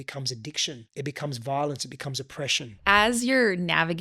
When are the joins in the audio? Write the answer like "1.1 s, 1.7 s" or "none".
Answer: 0.8 s, 2.8 s